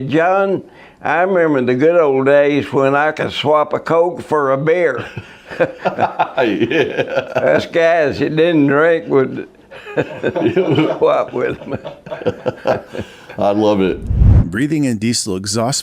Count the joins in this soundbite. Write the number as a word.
one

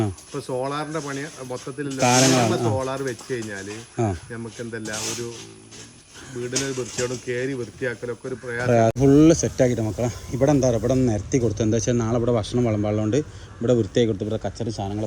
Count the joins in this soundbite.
one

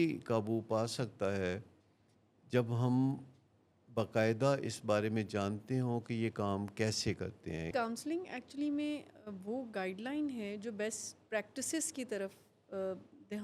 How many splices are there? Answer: one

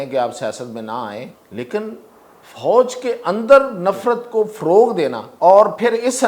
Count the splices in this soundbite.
two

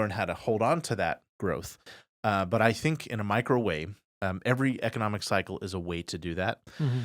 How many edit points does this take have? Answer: zero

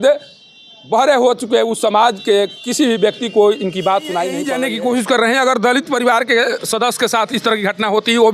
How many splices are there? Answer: one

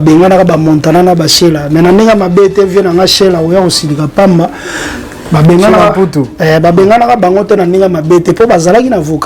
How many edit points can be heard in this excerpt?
zero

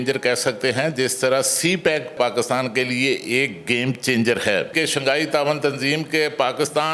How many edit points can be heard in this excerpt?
two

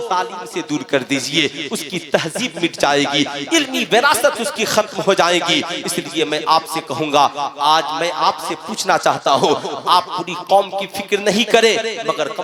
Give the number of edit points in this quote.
zero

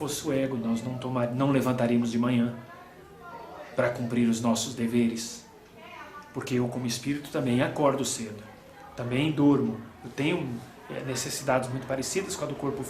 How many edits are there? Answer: zero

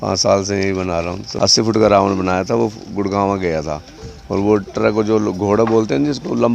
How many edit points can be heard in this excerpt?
one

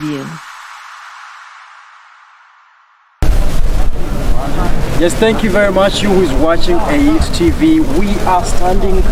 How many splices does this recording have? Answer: one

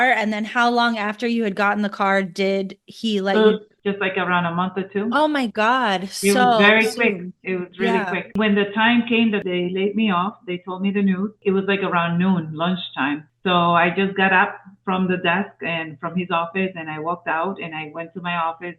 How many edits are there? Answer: two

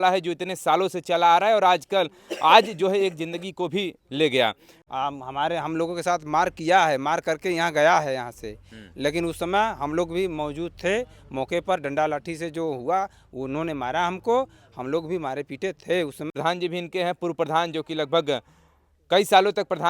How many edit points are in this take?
two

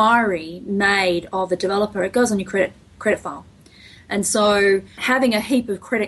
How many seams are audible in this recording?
one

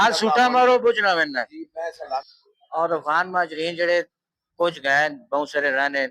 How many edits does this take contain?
one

